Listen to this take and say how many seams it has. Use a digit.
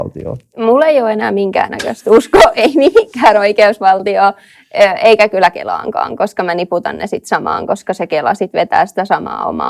0